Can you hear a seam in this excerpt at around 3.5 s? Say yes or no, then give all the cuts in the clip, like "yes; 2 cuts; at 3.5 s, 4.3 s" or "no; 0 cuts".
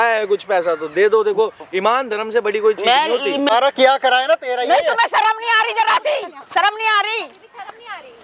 yes; 1 cut; at 3.5 s